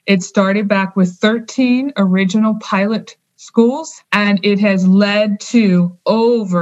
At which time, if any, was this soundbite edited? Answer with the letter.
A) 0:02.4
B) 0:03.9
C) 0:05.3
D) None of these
B